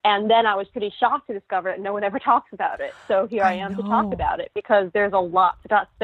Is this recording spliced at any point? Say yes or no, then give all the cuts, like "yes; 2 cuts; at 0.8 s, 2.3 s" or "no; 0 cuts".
no; 0 cuts